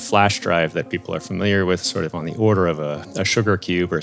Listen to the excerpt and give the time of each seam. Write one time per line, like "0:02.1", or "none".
0:01.9
0:03.0